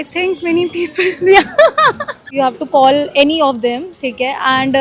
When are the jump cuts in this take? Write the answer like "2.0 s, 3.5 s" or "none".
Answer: 2.3 s